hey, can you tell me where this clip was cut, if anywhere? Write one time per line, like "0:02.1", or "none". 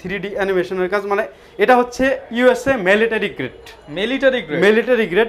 none